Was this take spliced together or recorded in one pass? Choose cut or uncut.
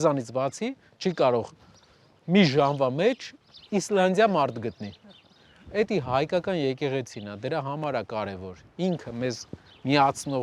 uncut